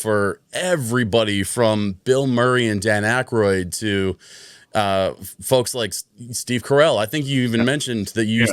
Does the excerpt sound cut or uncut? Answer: uncut